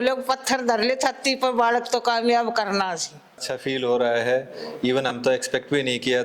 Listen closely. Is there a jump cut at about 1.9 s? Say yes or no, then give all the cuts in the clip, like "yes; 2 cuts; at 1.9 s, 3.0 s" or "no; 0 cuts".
no; 1 cut; at 3.4 s